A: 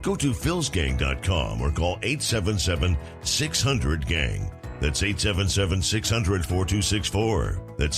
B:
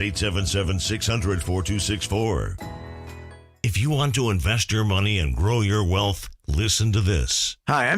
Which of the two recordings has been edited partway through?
B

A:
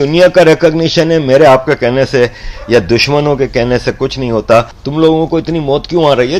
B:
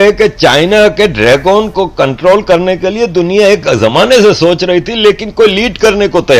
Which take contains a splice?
A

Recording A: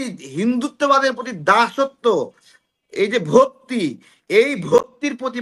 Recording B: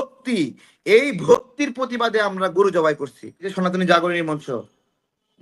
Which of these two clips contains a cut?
B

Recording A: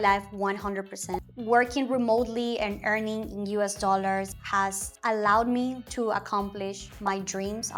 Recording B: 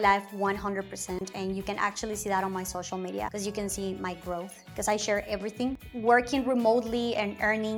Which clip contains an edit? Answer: A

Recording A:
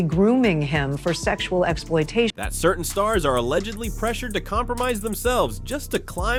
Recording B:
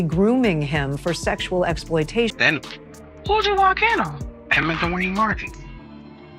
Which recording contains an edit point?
B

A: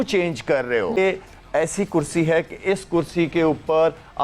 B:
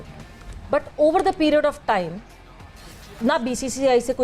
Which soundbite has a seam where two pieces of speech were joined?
A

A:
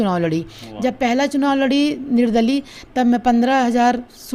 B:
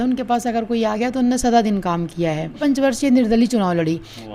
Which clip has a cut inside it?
B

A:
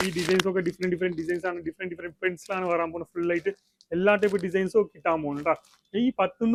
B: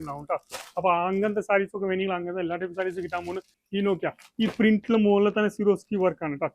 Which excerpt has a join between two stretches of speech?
B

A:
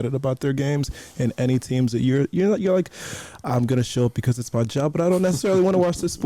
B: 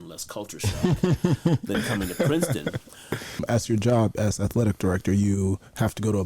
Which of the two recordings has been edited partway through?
B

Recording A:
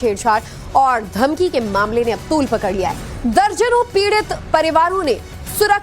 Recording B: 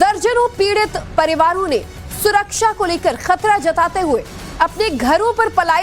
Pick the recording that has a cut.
A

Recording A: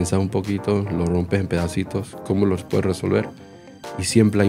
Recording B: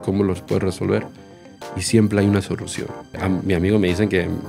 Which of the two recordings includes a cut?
B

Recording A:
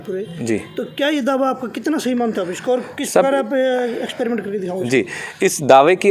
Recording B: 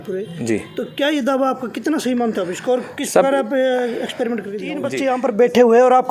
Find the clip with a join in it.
B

